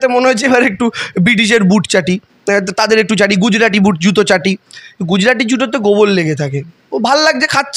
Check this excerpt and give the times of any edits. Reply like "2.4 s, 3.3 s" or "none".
none